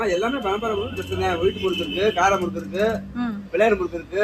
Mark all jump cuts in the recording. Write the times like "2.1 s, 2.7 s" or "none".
none